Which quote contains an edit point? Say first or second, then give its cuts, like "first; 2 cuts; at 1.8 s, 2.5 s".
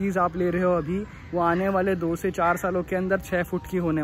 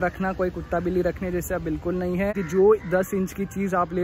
second; 1 cut; at 2.4 s